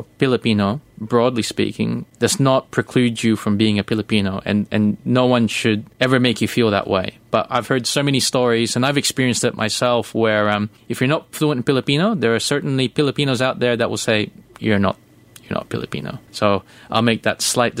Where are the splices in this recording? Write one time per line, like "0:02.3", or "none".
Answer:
0:02.0
0:05.9
0:10.8
0:16.2